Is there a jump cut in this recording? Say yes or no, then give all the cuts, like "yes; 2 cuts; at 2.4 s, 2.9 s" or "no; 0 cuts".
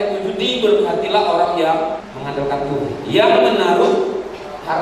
yes; 1 cut; at 2.1 s